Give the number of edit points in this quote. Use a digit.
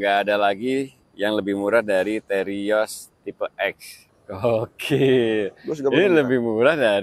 1